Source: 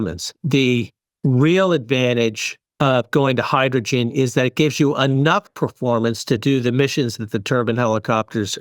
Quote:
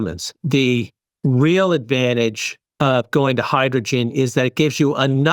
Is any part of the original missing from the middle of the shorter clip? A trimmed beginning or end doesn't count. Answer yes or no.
no